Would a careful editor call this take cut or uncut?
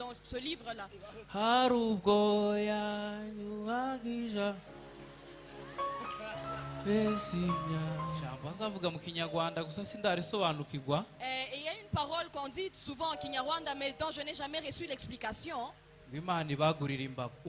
cut